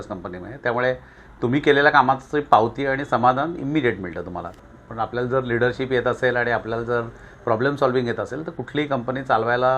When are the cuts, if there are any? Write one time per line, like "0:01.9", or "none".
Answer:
0:04.5